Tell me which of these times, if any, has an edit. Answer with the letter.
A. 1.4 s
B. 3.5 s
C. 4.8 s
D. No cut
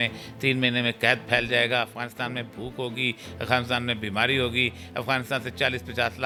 D